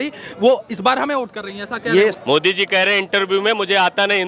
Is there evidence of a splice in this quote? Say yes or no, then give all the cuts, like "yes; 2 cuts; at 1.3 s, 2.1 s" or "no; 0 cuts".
yes; 1 cut; at 2.2 s